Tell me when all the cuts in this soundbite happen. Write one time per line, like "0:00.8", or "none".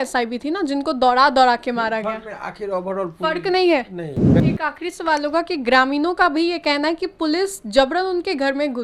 0:04.5